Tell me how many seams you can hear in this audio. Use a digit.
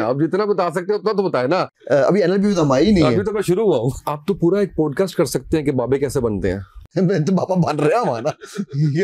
3